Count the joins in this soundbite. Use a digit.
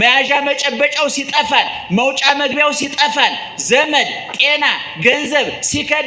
0